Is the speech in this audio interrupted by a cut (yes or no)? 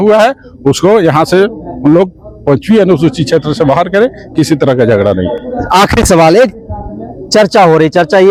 no